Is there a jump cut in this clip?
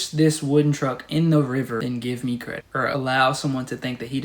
yes; 2 cuts; at 1.8 s, 2.8 s

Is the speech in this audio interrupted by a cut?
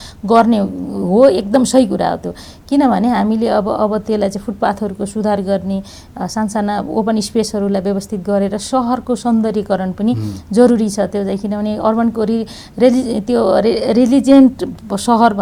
no; 0 cuts

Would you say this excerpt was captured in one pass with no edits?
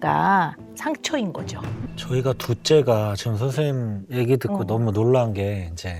no; 1 cut; at 1.8 s

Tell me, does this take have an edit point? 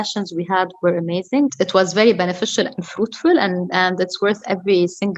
yes; 1 cut; at 1.5 s

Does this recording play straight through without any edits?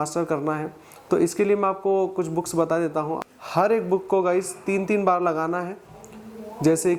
no; 1 cut; at 3.2 s

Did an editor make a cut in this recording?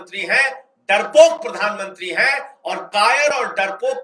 no; 0 cuts

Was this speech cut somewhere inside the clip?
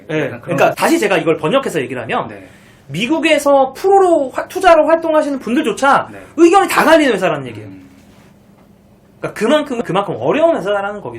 yes; 2 cuts; at 0.8 s, 9.8 s

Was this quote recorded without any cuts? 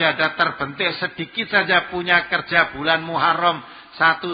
yes; 0 cuts

